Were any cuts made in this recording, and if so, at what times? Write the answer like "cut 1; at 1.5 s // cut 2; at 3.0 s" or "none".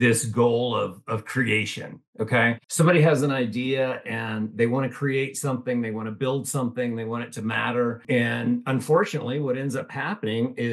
cut 1; at 2.6 s // cut 2; at 8.0 s